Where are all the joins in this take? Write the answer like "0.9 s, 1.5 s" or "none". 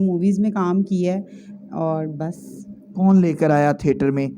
none